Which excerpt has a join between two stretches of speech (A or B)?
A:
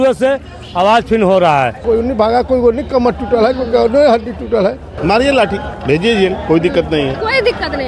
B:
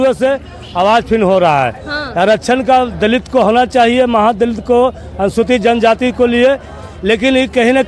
A